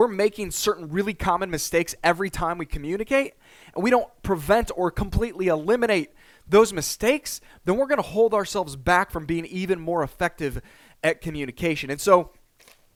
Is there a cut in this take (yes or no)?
no